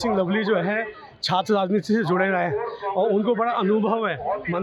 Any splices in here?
no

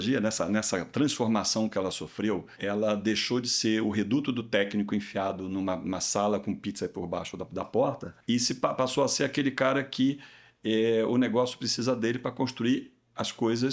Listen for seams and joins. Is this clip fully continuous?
no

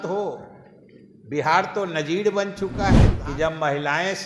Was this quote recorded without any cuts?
no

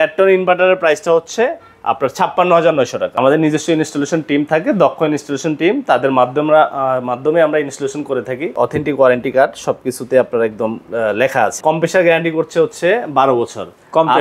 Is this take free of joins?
no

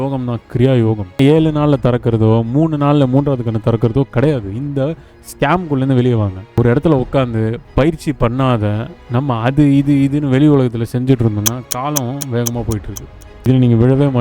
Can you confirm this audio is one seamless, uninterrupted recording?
no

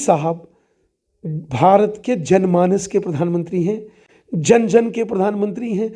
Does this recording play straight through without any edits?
yes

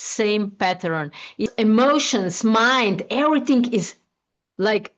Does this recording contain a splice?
yes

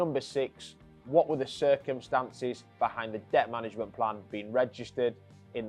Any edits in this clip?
no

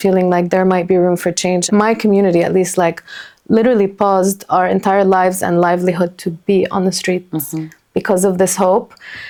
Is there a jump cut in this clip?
no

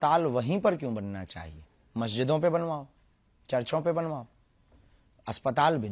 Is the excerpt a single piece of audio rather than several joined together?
yes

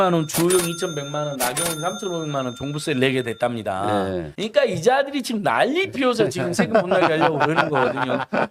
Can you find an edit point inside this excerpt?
no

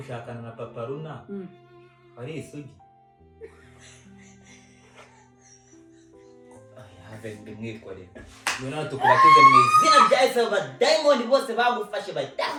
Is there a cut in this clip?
no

